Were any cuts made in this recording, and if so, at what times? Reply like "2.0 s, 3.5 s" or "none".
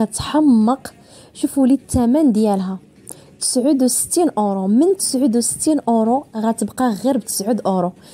none